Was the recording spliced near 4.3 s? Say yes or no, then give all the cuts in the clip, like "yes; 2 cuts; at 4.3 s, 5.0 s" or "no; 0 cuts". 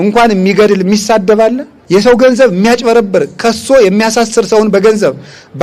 no; 1 cut; at 1.7 s